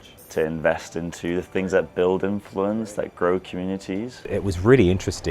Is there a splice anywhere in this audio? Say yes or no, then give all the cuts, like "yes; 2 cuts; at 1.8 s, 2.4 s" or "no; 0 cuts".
yes; 1 cut; at 4.2 s